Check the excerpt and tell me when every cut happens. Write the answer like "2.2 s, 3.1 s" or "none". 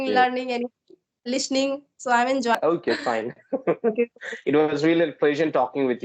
2.5 s